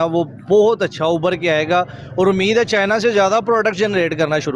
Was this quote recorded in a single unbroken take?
yes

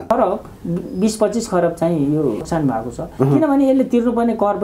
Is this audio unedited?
yes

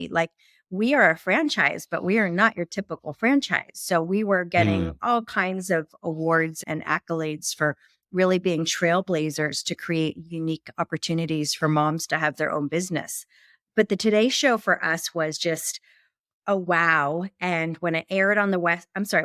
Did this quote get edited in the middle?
no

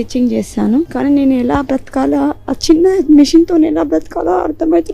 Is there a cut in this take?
yes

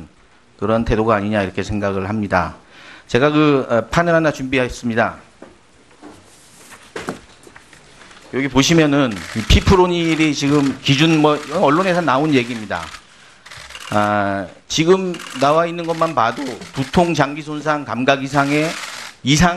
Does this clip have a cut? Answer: no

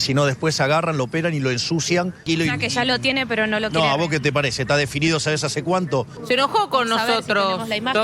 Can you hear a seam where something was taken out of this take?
yes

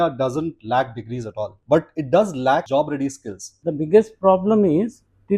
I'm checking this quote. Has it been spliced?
yes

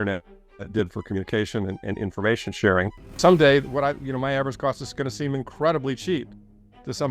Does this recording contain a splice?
yes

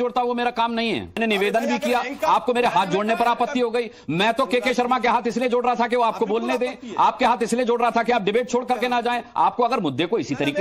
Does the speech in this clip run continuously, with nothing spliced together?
no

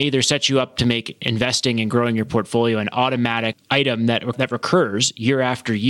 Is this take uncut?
no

